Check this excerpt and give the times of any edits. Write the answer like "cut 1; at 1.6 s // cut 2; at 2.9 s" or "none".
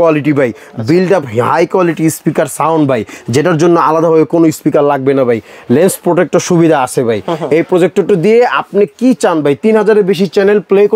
none